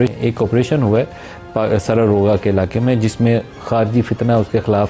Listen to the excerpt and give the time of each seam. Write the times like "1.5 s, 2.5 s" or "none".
none